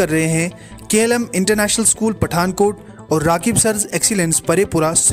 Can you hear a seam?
no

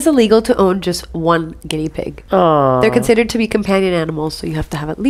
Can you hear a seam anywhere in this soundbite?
yes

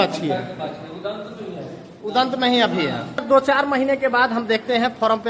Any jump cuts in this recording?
yes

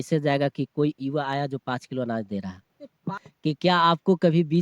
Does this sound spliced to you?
yes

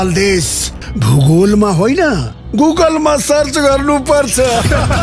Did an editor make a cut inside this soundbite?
no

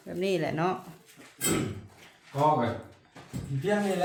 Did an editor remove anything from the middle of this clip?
no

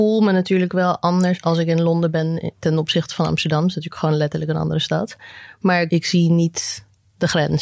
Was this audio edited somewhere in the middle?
yes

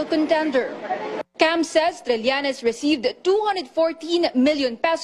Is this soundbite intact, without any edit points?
no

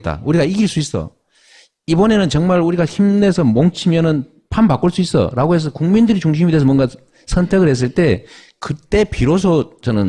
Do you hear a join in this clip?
no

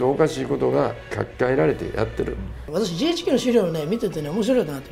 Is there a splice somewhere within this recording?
yes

